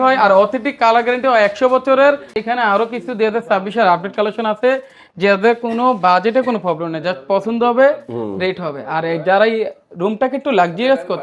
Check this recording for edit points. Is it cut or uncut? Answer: cut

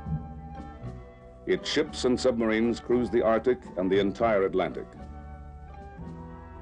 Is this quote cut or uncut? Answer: cut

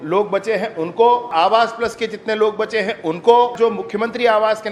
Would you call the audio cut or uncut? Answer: cut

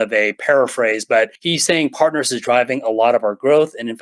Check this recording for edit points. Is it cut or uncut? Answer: cut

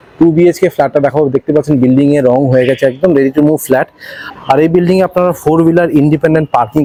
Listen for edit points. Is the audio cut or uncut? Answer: uncut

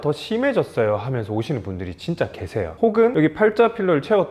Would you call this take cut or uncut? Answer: uncut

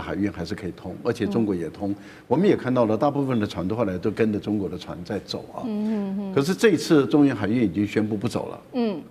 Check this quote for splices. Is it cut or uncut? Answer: uncut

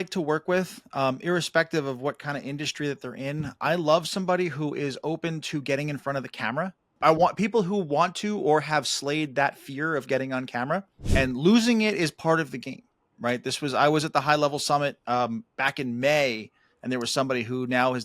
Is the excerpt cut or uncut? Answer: cut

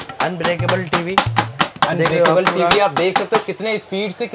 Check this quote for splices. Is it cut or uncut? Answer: uncut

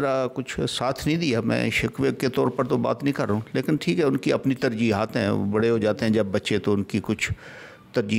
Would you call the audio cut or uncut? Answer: uncut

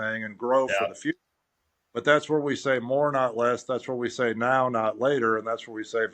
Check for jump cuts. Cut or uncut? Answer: uncut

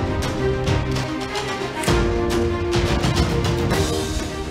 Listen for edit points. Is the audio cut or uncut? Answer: cut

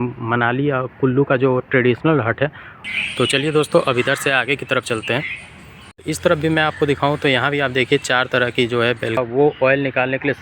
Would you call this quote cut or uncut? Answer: cut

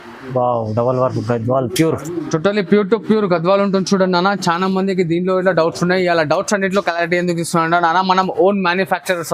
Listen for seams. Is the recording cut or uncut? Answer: uncut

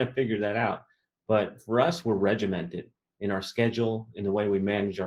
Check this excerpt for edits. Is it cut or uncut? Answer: uncut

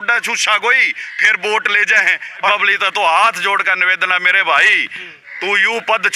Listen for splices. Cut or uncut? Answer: cut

